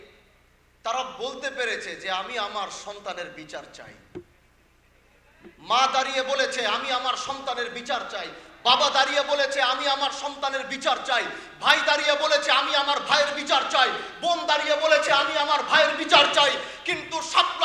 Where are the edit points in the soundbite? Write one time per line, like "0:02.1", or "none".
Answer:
none